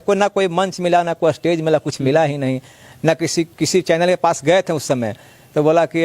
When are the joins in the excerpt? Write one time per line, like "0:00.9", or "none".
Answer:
none